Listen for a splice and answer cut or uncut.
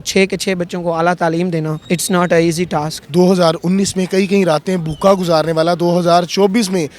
cut